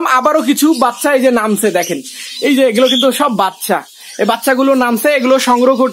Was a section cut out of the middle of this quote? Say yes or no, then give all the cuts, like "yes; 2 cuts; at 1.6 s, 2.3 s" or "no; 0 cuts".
no; 0 cuts